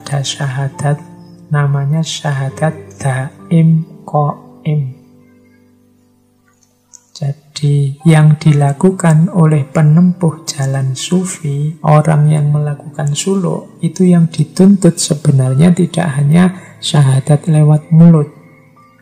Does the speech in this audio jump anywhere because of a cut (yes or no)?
no